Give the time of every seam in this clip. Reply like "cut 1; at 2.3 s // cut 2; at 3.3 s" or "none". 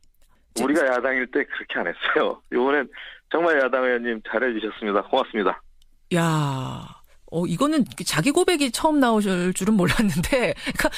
cut 1; at 5.0 s